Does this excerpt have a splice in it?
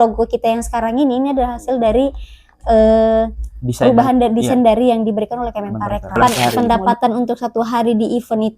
yes; 1 cut; at 6.2 s

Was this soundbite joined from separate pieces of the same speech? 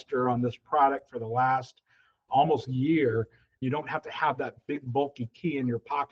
yes; 2 cuts; at 2.2 s, 3.6 s

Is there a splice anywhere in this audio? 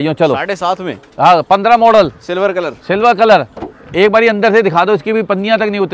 no; 0 cuts

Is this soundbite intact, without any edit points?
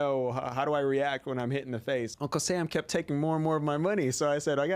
no; 1 cut; at 2.1 s

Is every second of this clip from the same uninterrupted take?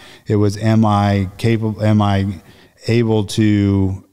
yes; 0 cuts

